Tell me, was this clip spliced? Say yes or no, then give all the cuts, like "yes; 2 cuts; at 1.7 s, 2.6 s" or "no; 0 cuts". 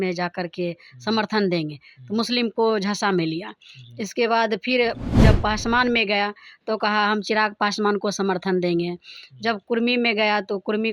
no; 0 cuts